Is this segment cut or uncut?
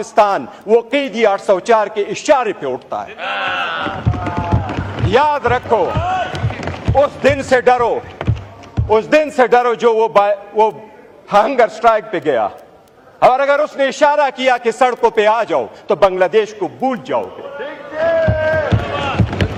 uncut